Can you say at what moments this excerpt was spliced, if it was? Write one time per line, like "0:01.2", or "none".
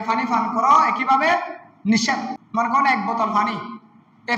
0:02.4